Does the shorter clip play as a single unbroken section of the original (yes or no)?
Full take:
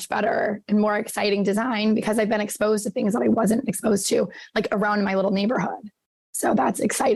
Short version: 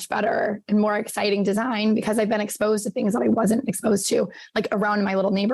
yes